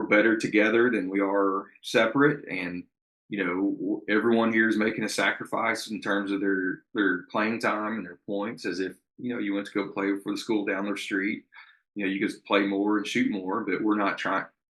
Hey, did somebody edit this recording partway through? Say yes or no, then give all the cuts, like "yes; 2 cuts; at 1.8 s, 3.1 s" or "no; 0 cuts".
no; 0 cuts